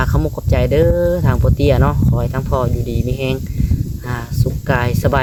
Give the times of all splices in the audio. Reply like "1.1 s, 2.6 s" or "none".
none

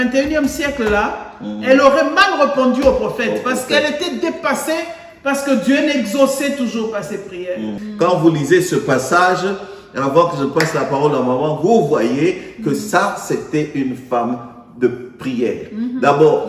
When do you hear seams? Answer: 7.8 s

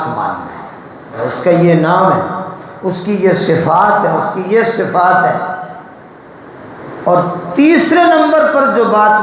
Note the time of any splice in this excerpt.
1.2 s

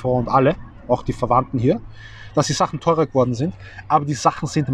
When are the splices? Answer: none

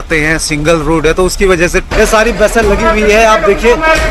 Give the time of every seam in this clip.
1.8 s

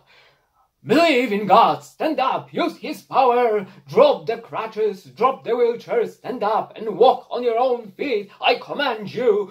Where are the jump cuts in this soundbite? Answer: none

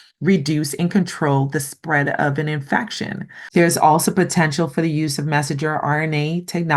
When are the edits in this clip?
3.4 s

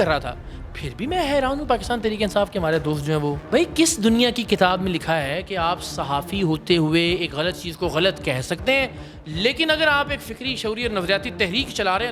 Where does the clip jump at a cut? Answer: 3.4 s

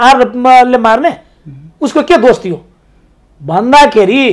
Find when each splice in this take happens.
none

